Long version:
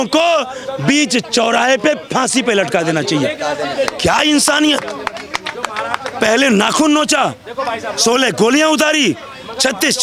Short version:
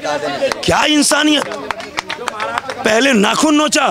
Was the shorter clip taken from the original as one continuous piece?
yes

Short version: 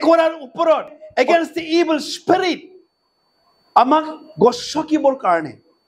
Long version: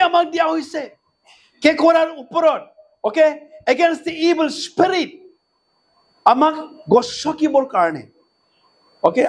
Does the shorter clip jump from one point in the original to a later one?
yes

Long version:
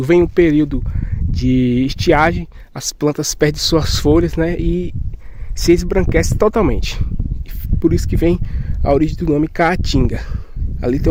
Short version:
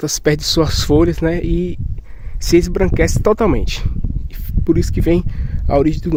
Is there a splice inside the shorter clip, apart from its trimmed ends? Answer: no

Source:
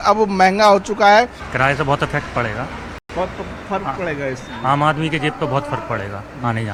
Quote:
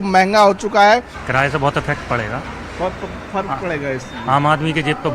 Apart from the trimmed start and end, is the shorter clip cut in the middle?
yes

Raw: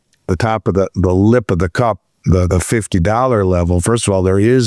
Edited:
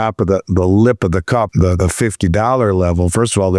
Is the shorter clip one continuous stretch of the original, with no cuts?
no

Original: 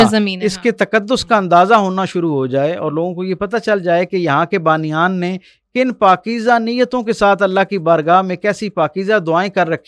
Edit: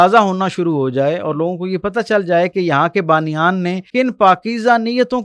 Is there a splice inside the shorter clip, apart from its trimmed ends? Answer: yes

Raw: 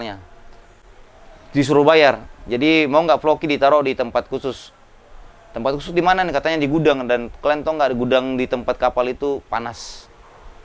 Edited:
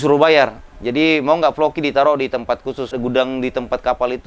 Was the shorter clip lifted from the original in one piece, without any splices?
no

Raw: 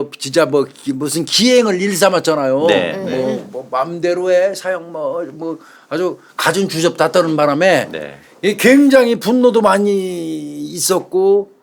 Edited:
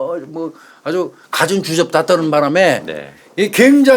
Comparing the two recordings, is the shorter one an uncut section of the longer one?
yes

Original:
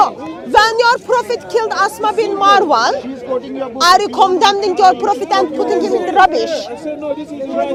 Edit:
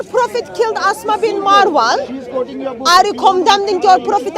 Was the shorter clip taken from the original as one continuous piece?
yes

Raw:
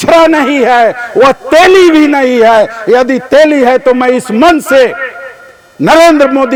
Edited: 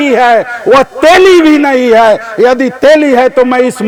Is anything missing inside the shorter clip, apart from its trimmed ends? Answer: no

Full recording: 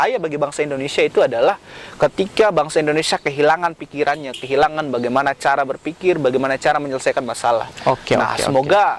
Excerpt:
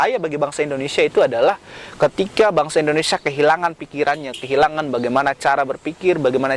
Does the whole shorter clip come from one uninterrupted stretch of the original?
yes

